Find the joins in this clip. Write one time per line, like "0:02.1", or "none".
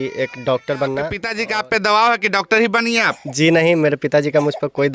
0:01.3